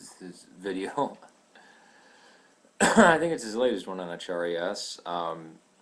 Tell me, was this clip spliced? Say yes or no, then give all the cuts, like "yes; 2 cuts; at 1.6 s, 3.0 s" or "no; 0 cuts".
yes; 1 cut; at 3.9 s